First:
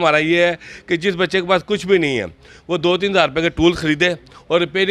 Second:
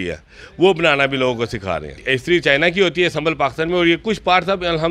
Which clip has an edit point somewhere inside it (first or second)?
second